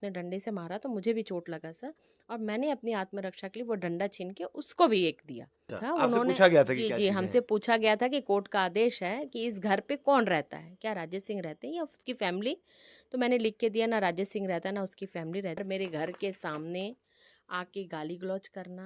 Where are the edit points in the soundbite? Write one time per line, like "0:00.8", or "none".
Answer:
0:05.7
0:15.6